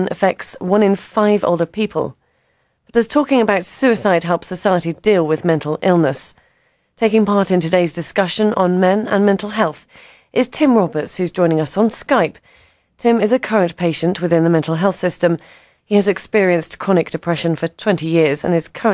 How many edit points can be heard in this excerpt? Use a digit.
0